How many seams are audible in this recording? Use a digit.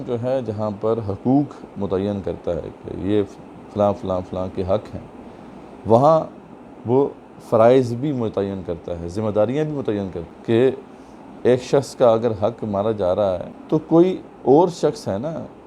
2